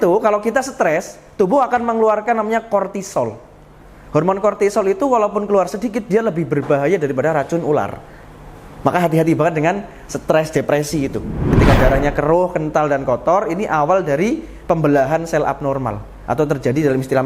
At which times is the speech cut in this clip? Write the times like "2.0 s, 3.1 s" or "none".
11.5 s